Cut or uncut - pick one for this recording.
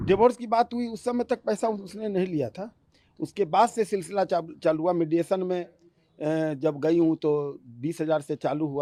uncut